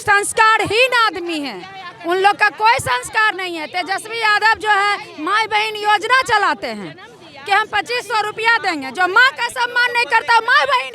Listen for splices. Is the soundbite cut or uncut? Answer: uncut